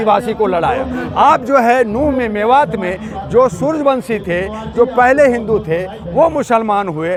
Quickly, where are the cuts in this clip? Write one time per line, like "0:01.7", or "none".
none